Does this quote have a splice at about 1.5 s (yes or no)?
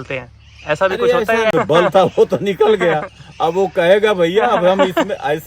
yes